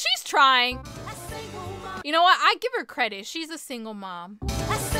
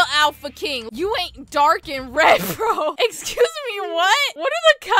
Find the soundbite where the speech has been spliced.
first; 1 cut; at 2.0 s

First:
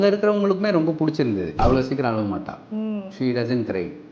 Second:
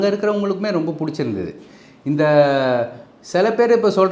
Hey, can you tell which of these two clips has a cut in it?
first; 1 cut; at 1.6 s

